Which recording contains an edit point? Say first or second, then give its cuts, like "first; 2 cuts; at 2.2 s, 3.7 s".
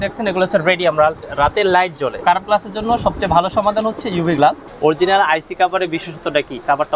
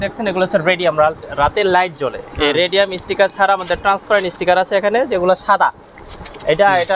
first; 2 cuts; at 2.2 s, 4.7 s